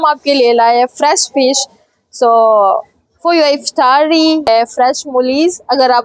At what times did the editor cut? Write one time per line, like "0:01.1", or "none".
0:04.5